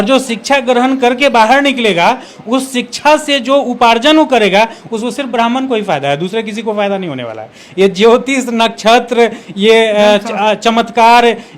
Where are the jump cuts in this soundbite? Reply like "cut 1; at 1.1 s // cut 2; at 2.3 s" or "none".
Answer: none